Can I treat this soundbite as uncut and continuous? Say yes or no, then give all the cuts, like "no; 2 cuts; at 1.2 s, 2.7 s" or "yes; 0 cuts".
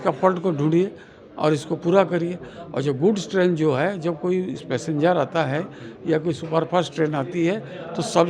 yes; 0 cuts